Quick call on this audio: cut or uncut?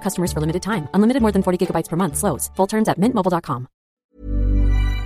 cut